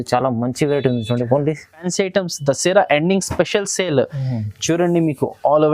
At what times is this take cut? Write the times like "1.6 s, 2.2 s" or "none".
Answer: 1.8 s